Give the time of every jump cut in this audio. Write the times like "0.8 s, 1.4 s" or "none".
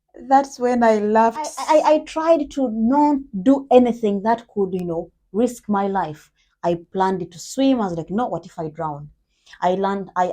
1.5 s